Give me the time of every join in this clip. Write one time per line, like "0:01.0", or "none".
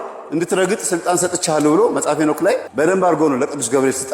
0:02.7